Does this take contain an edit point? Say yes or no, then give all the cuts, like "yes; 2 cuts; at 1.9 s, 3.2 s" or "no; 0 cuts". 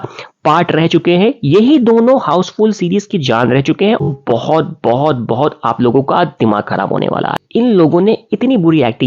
yes; 2 cuts; at 4.1 s, 7.4 s